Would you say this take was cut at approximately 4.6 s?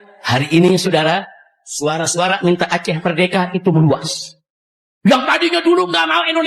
no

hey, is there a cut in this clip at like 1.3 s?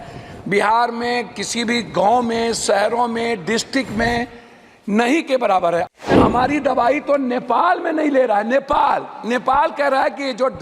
no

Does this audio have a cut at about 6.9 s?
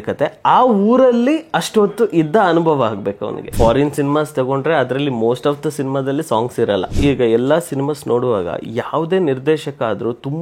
yes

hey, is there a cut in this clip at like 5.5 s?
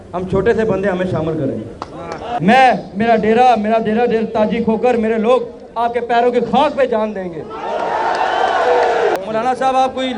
no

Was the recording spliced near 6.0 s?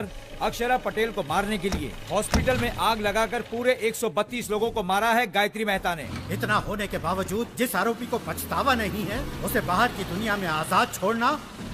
yes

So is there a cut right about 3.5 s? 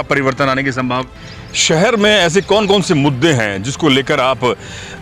no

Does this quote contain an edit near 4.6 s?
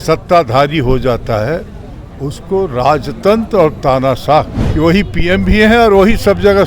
yes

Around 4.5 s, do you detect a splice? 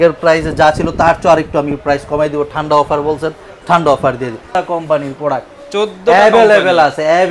yes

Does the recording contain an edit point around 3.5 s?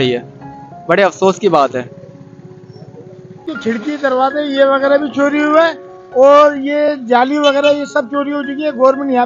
yes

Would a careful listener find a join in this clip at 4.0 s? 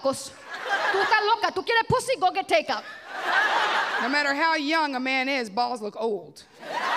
yes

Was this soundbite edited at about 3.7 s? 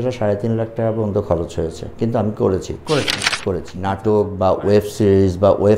yes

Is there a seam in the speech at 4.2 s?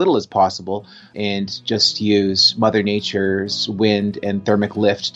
no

